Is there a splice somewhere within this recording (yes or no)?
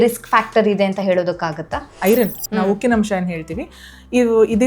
yes